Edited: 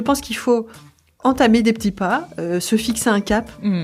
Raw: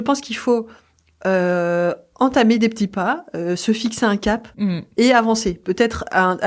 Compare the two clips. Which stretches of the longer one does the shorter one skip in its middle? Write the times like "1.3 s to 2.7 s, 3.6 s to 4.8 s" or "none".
1.1 s to 2.1 s